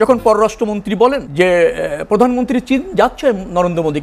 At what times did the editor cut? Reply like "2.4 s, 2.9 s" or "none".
1.2 s